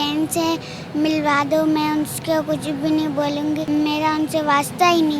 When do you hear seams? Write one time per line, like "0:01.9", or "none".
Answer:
0:03.6